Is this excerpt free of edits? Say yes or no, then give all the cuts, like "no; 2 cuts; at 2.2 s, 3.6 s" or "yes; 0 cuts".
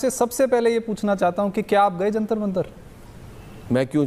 yes; 0 cuts